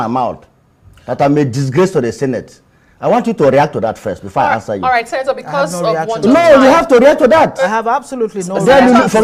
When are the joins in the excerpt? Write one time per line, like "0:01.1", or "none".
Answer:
none